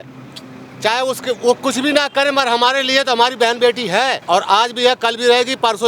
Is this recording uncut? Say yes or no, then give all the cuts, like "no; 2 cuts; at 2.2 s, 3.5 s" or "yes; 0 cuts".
no; 1 cut; at 4.2 s